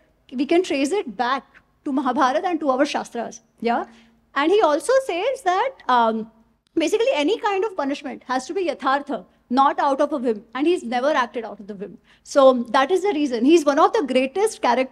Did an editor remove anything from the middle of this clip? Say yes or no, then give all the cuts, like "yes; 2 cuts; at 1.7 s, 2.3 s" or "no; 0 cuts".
no; 0 cuts